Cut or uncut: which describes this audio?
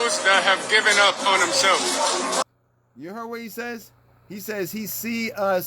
uncut